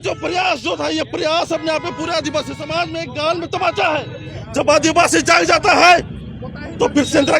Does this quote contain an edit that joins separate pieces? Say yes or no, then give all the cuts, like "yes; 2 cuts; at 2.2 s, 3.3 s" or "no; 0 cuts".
yes; 1 cut; at 4.4 s